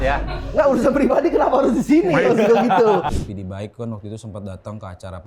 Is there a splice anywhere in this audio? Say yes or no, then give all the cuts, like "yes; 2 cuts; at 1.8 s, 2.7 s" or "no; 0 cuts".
yes; 1 cut; at 3.1 s